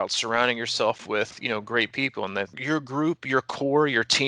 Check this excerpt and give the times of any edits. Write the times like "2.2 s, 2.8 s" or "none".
2.6 s